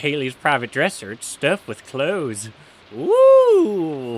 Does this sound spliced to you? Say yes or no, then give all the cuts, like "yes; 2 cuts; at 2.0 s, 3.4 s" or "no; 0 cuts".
no; 0 cuts